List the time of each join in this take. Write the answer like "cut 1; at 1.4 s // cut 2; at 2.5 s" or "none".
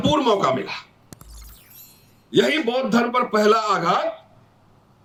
none